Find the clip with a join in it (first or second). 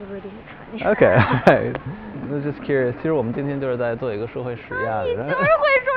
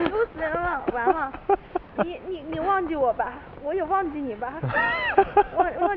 first